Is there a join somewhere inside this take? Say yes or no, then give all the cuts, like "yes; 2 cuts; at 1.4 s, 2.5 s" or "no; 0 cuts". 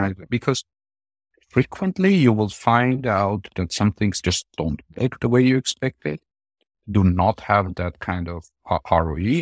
no; 0 cuts